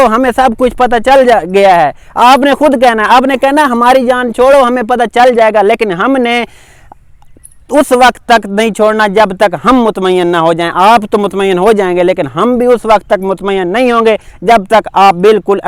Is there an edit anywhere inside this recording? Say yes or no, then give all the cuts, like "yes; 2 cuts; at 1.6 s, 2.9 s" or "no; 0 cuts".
no; 0 cuts